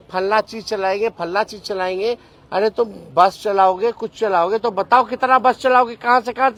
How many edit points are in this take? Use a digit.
0